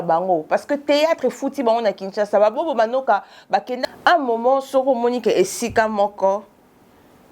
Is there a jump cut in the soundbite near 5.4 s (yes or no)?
no